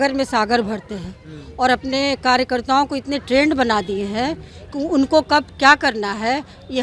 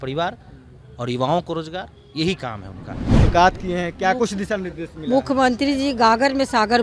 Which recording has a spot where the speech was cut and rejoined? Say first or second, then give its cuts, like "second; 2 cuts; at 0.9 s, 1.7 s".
second; 1 cut; at 3.3 s